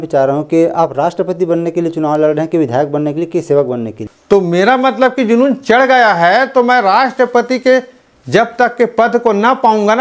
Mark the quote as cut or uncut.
cut